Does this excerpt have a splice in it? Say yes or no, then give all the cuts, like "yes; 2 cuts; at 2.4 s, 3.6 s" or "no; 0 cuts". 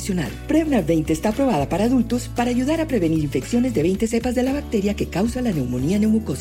no; 0 cuts